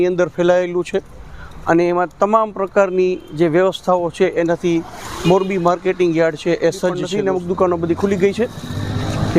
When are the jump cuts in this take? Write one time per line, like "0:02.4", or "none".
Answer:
0:07.0